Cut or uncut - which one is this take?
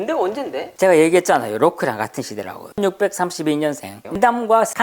uncut